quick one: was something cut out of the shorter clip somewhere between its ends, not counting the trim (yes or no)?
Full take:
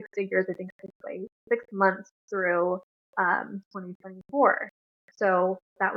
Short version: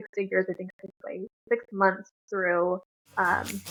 no